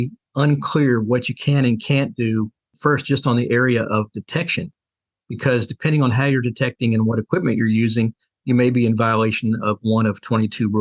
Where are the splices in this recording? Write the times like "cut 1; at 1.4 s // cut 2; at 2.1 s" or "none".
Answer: none